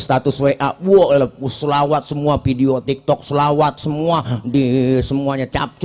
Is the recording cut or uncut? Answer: uncut